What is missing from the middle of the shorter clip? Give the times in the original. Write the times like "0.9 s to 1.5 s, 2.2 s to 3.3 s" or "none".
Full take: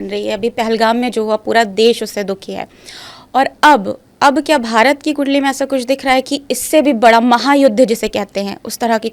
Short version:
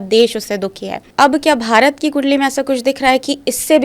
2.6 s to 4.0 s